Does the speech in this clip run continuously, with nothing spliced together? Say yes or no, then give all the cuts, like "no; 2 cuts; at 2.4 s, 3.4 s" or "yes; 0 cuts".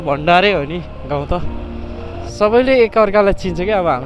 no; 1 cut; at 2.2 s